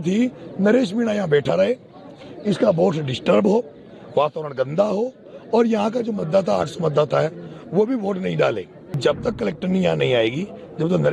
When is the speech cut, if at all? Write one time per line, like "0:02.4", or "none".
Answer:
0:08.9